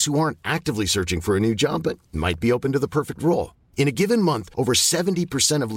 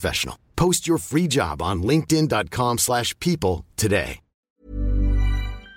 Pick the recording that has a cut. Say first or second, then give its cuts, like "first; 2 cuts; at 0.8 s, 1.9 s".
second; 1 cut; at 4.4 s